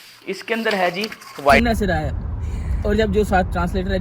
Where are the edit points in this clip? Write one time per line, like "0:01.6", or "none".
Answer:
0:01.6

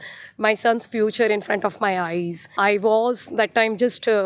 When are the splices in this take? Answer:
0:02.5

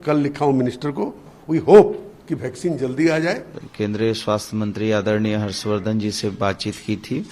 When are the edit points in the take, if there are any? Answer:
0:03.6

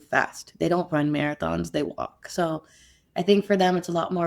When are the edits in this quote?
none

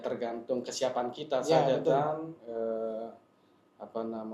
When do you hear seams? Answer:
none

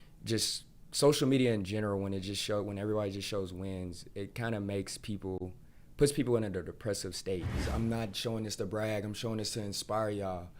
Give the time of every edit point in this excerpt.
0:07.6

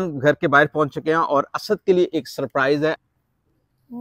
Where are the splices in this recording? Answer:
0:03.1

